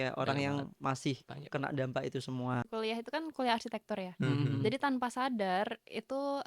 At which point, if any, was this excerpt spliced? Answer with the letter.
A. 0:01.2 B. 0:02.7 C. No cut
B